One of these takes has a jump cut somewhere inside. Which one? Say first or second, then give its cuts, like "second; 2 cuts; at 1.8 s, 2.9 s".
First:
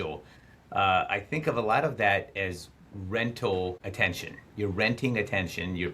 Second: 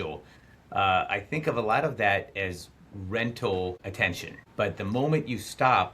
second; 1 cut; at 4.0 s